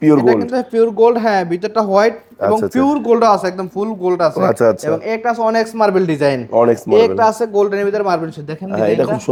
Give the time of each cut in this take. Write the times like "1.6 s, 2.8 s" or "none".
none